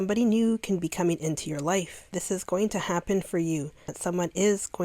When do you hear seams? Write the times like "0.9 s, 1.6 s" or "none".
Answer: 2.1 s, 3.9 s